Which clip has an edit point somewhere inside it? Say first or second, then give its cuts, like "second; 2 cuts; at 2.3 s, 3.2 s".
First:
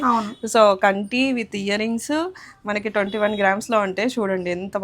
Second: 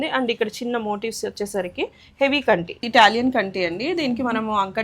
second; 1 cut; at 2.8 s